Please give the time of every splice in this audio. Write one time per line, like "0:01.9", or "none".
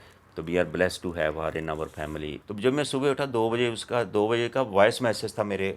0:02.4